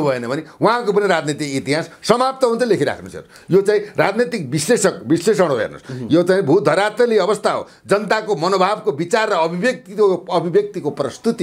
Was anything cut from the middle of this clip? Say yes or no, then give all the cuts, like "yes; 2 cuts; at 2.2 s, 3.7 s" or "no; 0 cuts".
no; 0 cuts